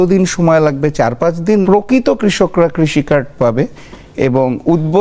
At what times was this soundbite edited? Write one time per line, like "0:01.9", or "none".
0:01.6